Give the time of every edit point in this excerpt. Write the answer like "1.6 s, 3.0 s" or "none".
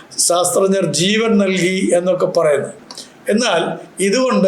2.8 s